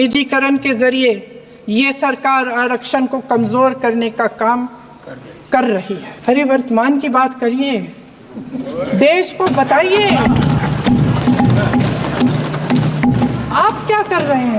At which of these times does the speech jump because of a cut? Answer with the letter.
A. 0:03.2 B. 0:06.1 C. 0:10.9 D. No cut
B